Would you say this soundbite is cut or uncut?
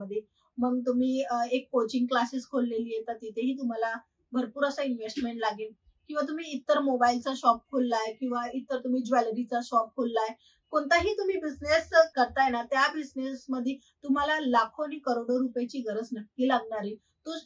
uncut